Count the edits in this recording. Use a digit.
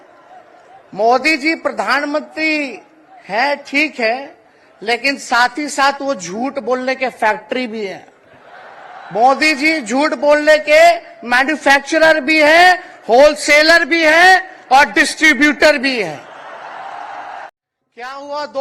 1